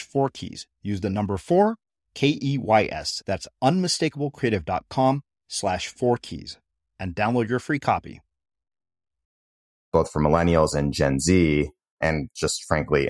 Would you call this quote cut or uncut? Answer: cut